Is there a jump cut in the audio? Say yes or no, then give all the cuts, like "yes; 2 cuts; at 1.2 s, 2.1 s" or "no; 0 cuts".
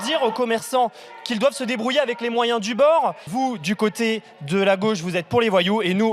yes; 1 cut; at 3.3 s